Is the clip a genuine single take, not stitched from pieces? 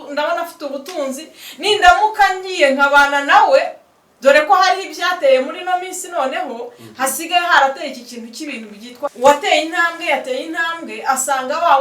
no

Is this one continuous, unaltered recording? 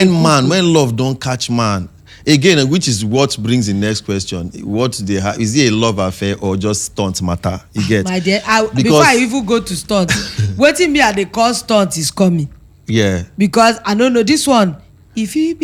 yes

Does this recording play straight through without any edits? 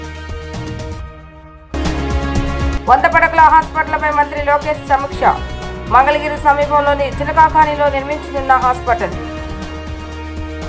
no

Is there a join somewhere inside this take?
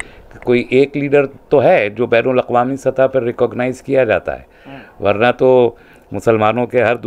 no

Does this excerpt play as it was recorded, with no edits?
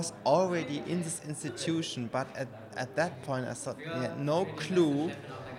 yes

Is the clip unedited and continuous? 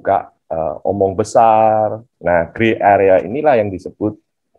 no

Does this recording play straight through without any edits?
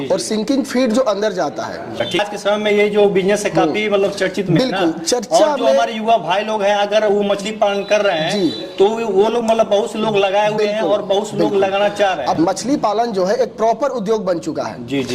no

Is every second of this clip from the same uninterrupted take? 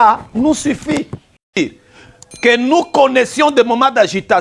no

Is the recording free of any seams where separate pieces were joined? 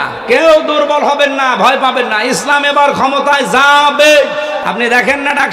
no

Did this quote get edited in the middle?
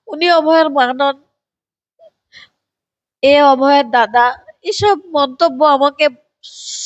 no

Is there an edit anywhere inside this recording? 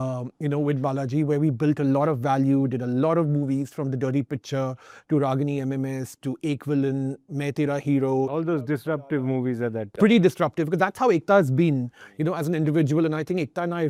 no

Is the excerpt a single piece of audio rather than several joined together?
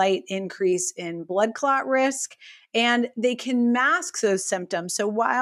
yes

